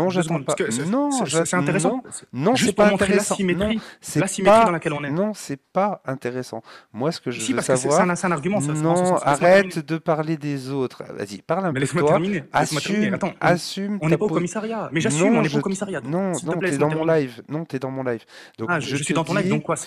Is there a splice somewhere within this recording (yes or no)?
no